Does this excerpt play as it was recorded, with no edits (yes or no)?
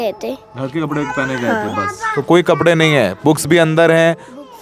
yes